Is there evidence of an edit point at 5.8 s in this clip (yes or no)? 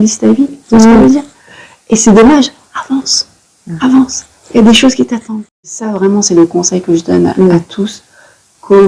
yes